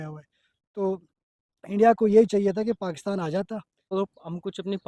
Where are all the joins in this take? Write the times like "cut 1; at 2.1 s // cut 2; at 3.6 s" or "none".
cut 1; at 3.9 s